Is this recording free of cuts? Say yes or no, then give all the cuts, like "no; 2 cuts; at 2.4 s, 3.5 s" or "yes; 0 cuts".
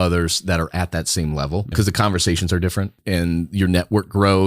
no; 2 cuts; at 1.7 s, 3.0 s